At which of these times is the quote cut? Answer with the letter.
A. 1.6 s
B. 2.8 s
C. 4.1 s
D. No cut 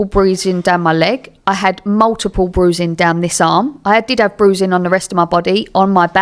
D